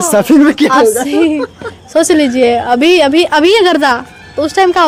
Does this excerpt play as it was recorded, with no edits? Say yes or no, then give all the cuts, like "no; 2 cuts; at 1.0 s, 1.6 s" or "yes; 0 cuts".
yes; 0 cuts